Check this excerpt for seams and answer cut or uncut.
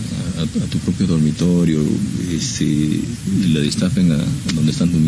uncut